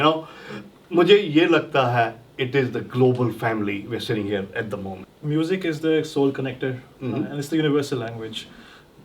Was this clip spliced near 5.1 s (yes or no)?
yes